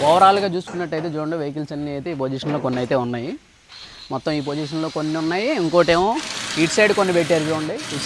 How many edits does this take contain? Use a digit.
0